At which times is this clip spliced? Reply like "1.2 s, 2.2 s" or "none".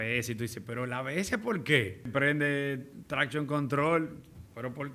2.1 s